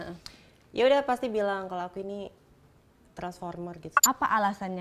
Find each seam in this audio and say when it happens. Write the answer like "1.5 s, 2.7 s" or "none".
3.9 s